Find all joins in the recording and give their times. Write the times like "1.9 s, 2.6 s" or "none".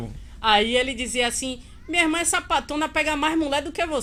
none